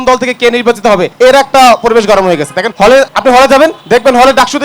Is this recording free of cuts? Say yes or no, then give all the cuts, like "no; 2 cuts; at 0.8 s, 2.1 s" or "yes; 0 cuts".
no; 3 cuts; at 1.1 s, 2.9 s, 3.8 s